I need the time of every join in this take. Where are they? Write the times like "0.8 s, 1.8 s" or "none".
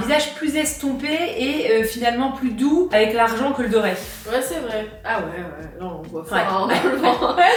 none